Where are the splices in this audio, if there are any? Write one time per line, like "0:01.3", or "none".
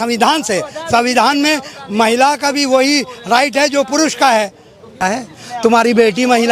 0:05.0

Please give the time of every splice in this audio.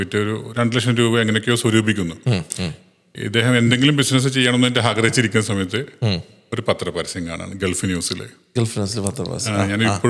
none

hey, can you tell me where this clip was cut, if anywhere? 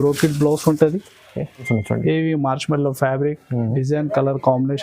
0:01.6

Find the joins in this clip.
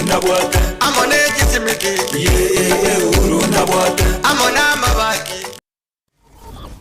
0:05.6

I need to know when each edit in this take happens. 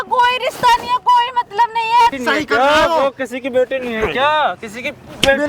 0:02.2

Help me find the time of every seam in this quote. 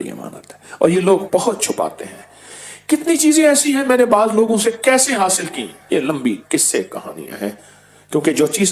0:05.7

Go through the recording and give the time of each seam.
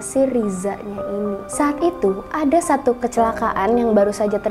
0:01.4

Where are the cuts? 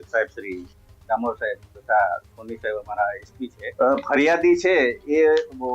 0:03.6

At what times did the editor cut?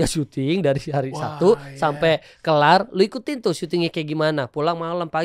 none

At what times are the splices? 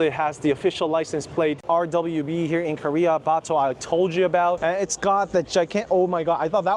0:01.6
0:04.6

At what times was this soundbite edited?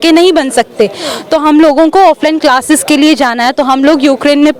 none

